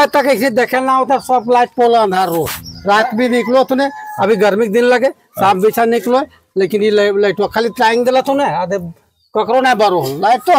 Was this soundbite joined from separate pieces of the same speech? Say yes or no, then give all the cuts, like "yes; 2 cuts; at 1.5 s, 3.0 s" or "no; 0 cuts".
no; 0 cuts